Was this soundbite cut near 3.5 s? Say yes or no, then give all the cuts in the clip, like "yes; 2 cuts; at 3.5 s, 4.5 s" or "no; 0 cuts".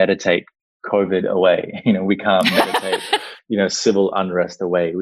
no; 0 cuts